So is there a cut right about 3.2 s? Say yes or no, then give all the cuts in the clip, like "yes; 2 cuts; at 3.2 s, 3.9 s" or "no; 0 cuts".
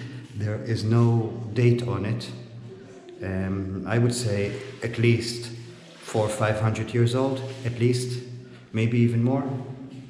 no; 0 cuts